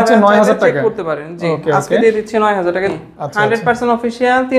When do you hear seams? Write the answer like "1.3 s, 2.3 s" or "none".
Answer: 2.9 s